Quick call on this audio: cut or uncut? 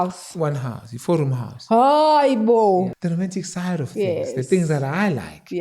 cut